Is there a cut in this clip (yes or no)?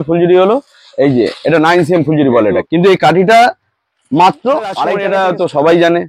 yes